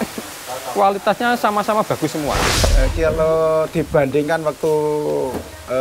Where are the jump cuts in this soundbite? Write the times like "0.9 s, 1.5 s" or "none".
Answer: 2.6 s